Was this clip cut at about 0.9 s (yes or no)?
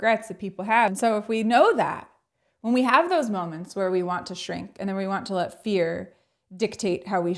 yes